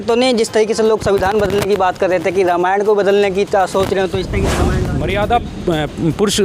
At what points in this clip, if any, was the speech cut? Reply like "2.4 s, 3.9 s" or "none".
4.9 s

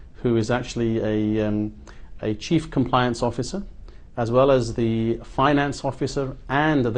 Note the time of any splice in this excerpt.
none

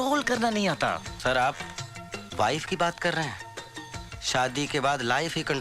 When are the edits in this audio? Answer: none

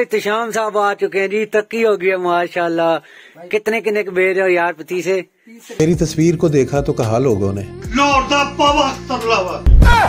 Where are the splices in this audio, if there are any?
1.6 s, 5.8 s

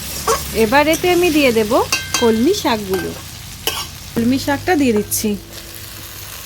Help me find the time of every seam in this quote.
4.2 s

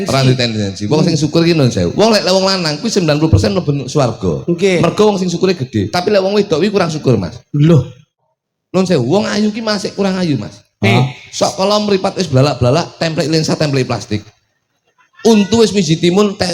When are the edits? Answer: 8.1 s

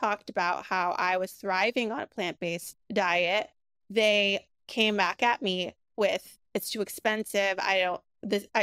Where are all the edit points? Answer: 2.7 s

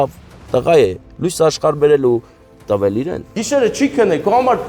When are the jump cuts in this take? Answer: 3.4 s

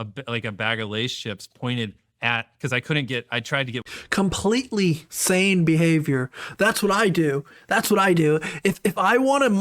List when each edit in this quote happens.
none

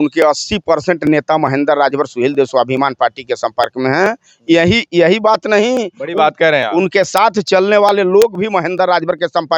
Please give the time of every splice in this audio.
none

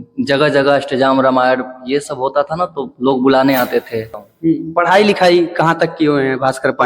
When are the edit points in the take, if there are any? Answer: 4.2 s

